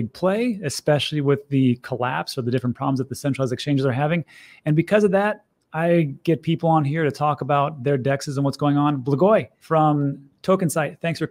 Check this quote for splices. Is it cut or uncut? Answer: cut